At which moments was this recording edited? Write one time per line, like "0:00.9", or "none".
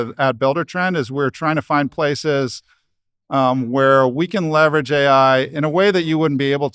none